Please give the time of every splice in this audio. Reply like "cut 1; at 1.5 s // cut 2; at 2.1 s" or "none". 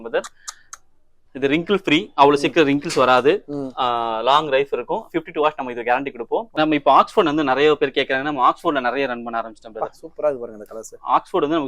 cut 1; at 6.5 s